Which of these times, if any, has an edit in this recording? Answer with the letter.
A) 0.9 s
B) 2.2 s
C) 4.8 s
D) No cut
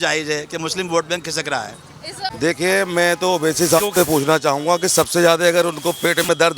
B